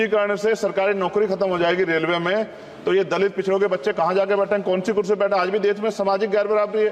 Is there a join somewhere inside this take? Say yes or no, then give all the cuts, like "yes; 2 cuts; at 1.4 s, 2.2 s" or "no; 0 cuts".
no; 0 cuts